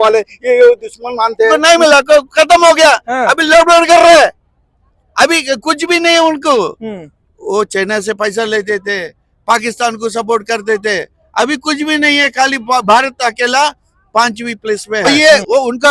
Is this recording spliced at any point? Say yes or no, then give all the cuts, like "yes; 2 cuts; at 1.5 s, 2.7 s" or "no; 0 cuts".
yes; 2 cuts; at 1.6 s, 15.0 s